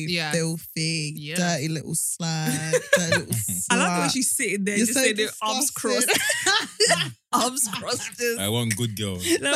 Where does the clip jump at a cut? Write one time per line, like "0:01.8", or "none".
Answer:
none